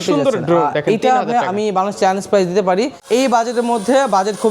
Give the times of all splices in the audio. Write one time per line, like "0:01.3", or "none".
0:03.0